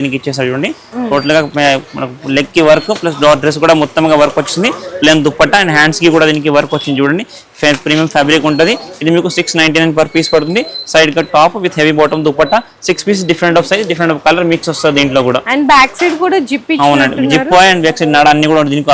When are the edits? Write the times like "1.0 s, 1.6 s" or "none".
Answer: none